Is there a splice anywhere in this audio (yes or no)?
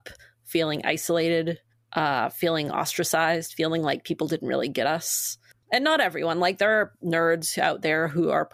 no